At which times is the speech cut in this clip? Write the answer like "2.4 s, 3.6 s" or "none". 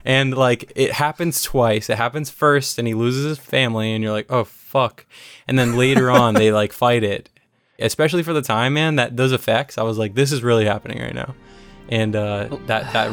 3.4 s, 7.8 s